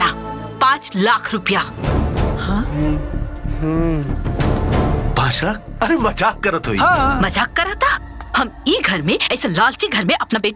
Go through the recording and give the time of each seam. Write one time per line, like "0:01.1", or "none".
none